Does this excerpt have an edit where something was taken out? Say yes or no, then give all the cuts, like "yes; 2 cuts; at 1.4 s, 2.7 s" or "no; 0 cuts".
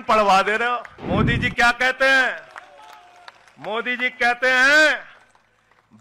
yes; 1 cut; at 0.9 s